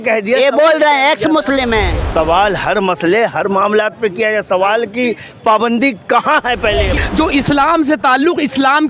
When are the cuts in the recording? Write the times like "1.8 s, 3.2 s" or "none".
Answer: 2.0 s, 6.9 s

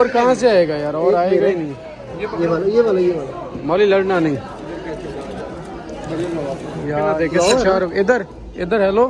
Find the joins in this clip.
7.1 s

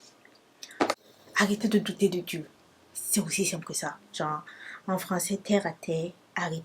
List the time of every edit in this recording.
1.1 s

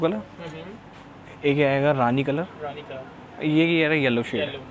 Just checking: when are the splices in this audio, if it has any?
none

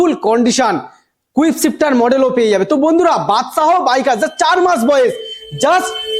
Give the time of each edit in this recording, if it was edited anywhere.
none

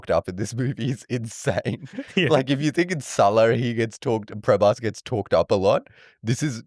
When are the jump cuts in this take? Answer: none

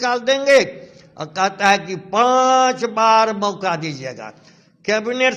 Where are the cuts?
none

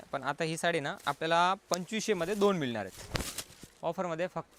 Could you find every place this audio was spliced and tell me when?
none

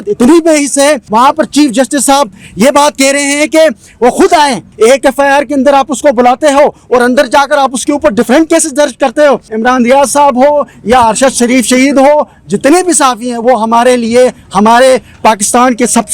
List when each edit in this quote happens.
1.0 s, 4.7 s, 9.5 s

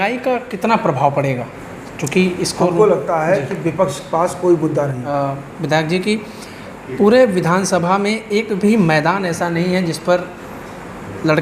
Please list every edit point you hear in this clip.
5.0 s

